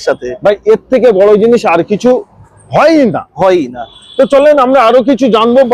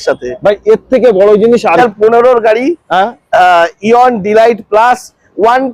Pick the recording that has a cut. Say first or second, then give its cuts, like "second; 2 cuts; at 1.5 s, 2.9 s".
second; 1 cut; at 1.8 s